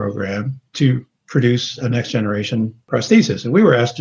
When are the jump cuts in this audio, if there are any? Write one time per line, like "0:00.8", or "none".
0:01.1
0:02.8